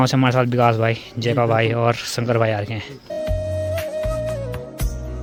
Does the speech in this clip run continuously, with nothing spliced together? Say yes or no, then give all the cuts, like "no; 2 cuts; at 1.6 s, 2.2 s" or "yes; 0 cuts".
yes; 0 cuts